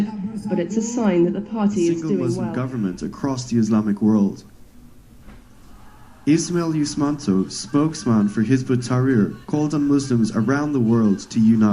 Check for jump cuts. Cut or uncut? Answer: cut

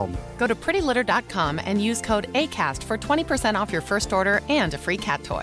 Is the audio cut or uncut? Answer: uncut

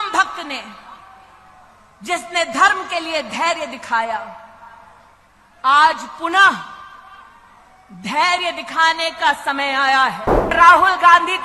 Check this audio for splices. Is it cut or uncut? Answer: cut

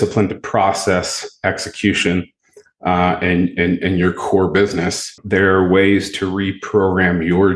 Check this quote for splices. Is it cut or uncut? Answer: cut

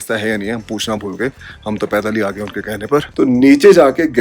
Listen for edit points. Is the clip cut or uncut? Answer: cut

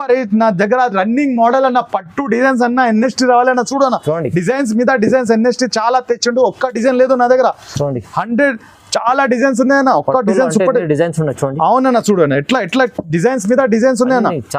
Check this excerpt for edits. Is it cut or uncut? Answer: uncut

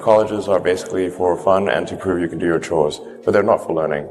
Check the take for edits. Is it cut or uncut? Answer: uncut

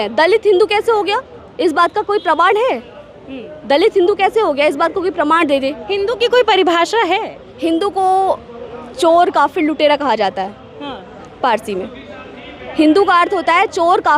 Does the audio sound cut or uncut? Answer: uncut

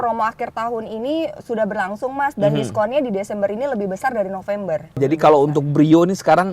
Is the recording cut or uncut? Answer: cut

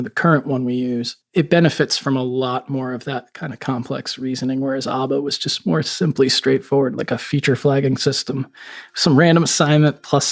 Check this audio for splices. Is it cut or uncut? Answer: cut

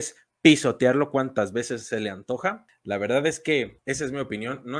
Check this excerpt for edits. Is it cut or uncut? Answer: cut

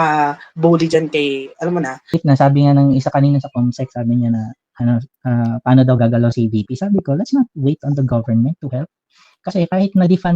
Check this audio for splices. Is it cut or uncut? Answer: cut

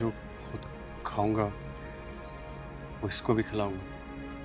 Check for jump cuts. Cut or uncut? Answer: uncut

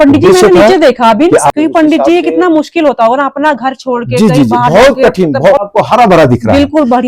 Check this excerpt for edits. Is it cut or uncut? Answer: cut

